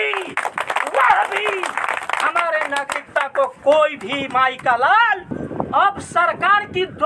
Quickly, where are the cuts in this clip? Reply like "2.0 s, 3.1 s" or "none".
5.4 s